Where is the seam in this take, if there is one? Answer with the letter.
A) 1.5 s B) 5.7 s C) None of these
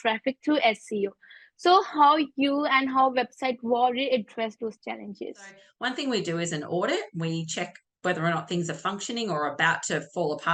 B